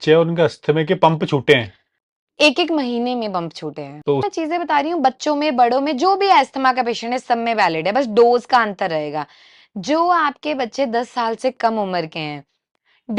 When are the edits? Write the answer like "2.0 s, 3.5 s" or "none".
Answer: 4.2 s